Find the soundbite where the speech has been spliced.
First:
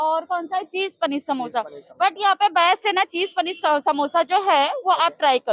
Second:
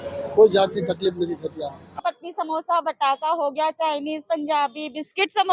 second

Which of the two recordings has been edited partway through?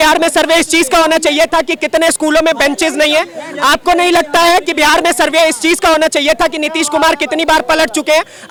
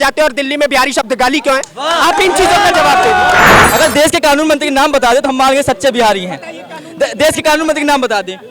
second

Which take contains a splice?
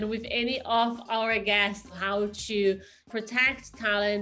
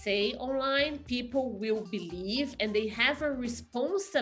first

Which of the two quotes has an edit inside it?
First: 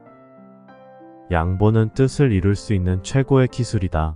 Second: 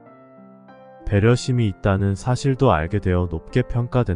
second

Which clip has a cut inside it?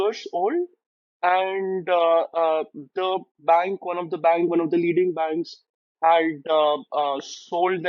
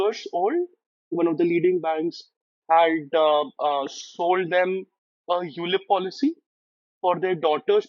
second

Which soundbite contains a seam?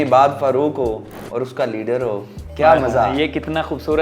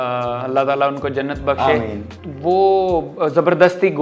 first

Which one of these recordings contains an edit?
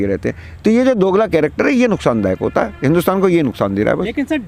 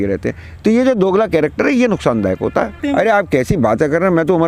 second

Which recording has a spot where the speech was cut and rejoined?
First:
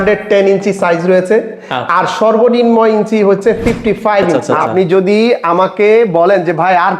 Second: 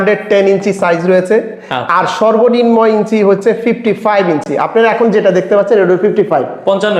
first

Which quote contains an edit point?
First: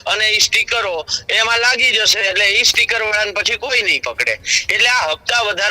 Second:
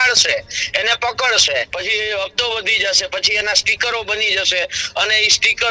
second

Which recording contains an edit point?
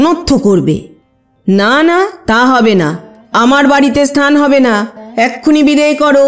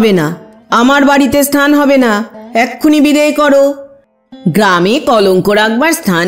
first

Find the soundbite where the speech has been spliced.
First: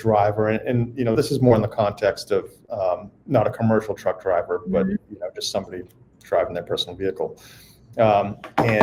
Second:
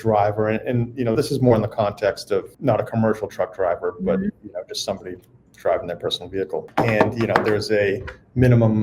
second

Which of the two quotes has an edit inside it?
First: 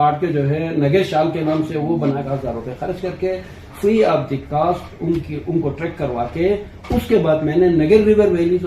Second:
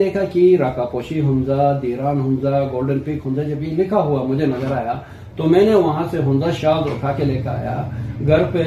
first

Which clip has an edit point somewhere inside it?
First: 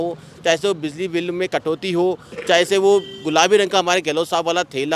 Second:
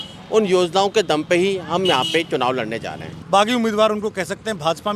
second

